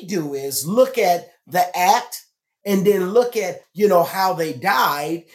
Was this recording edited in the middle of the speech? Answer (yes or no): yes